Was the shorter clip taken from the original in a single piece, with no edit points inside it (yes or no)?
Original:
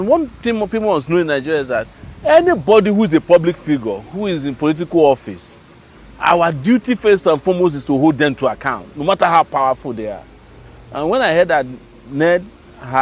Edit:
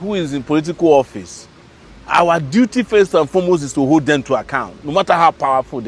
yes